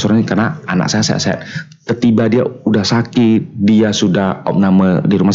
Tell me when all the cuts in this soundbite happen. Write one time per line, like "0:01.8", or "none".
none